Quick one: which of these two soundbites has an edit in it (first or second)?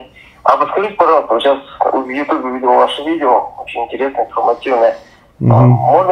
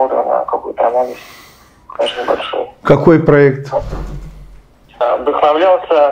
second